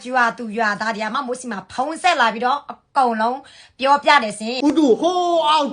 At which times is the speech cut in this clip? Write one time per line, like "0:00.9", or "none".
0:04.5